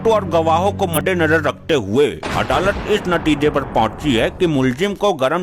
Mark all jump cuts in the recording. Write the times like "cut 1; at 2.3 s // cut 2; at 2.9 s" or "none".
cut 1; at 0.9 s